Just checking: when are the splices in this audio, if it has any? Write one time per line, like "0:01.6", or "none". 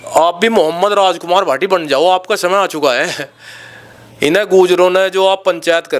none